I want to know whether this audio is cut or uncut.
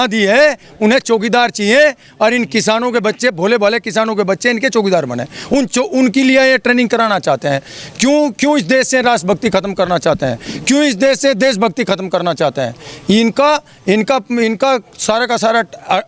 uncut